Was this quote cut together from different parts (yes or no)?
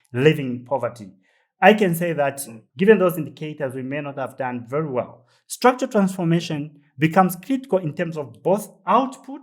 no